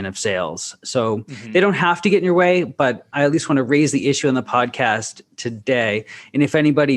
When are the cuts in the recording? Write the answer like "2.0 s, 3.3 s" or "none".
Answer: none